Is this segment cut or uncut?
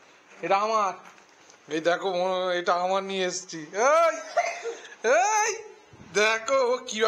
uncut